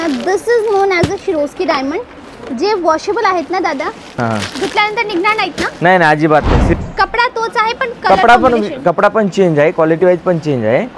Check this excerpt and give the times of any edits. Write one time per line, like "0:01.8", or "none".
0:04.0
0:06.7